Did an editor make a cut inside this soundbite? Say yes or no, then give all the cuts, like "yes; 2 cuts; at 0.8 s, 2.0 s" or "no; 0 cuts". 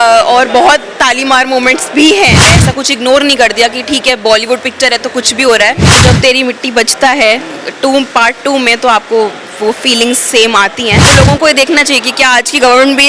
yes; 3 cuts; at 2.5 s, 6.0 s, 11.0 s